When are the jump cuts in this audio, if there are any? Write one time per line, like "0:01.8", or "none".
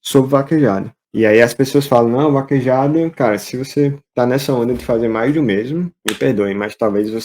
0:01.0
0:06.0